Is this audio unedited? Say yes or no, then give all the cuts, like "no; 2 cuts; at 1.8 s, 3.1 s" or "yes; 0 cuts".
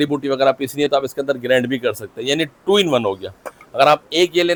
yes; 0 cuts